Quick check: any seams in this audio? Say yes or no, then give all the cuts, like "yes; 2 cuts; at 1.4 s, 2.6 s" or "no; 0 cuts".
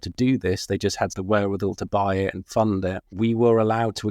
yes; 2 cuts; at 1.2 s, 3.0 s